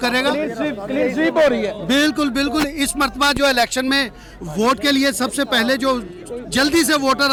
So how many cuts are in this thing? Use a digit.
0